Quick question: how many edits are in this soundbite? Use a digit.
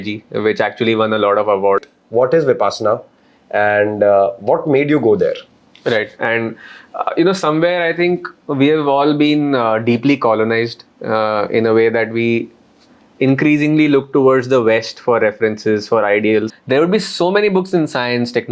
3